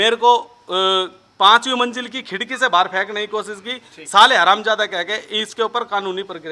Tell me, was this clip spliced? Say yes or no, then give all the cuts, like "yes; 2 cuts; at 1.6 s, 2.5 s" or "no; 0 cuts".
no; 0 cuts